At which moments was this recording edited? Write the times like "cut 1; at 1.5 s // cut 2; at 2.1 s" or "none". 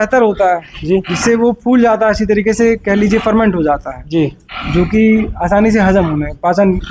none